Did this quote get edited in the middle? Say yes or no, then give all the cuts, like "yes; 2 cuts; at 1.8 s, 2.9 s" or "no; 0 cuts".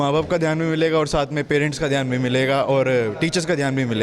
no; 0 cuts